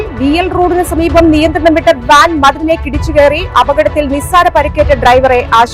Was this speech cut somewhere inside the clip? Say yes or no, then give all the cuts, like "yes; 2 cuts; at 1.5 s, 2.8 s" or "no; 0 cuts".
no; 0 cuts